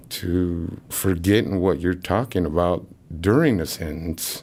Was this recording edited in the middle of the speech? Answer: no; 0 cuts

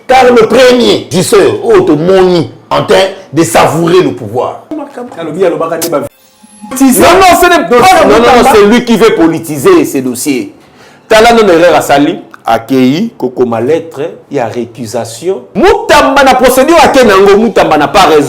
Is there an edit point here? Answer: yes; 5 cuts; at 1.1 s, 2.6 s, 4.8 s, 6.7 s, 15.5 s

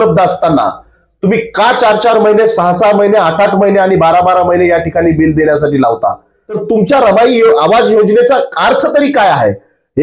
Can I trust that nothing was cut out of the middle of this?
no; 1 cut; at 6.6 s

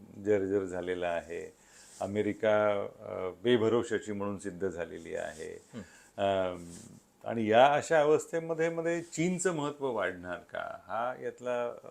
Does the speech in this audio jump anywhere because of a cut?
no; 0 cuts

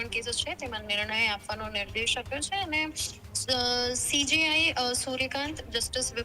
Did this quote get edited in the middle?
no; 0 cuts

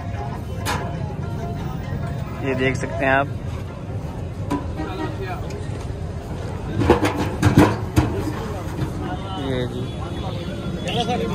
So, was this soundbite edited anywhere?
no; 0 cuts

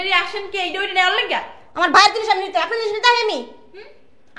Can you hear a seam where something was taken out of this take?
no; 0 cuts

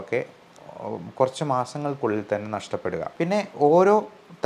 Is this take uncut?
no; 1 cut; at 3.1 s

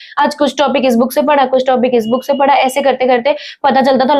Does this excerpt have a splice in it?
no; 0 cuts

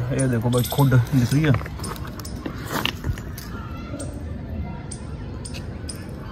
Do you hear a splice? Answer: no; 0 cuts

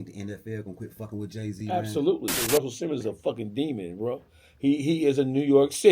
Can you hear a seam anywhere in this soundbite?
yes; 1 cut; at 2.4 s

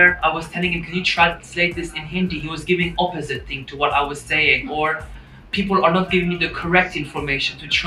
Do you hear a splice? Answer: no; 0 cuts

